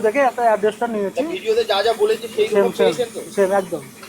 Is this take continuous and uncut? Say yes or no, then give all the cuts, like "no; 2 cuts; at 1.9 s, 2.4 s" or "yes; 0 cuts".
yes; 0 cuts